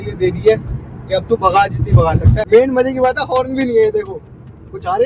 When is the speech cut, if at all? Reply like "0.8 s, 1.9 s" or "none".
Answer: 2.3 s